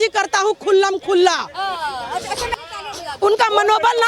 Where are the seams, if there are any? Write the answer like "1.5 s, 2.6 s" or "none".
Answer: 2.5 s

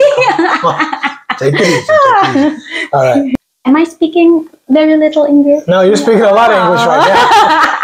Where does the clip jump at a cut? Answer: 3.5 s

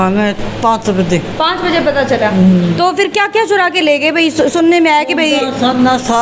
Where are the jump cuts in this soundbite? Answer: none

